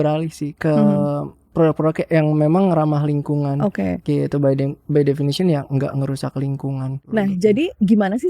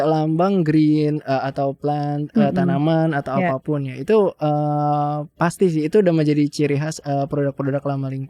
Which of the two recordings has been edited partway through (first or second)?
first